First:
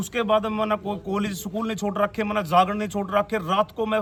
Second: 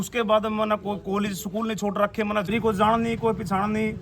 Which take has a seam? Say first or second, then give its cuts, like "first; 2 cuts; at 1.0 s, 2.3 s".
second; 1 cut; at 2.5 s